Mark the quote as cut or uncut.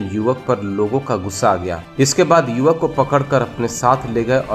cut